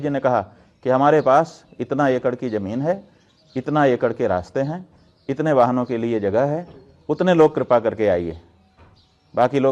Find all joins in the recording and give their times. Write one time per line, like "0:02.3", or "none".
none